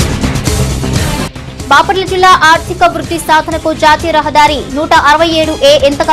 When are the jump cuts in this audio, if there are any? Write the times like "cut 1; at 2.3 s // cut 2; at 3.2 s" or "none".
cut 1; at 1.0 s